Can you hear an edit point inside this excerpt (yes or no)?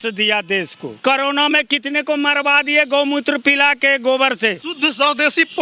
yes